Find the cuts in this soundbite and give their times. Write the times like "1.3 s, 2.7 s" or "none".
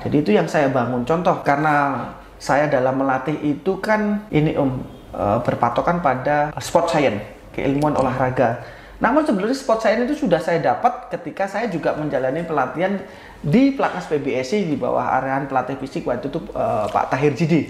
1.4 s, 4.2 s, 6.6 s